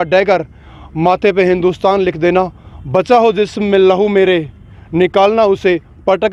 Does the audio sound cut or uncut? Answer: uncut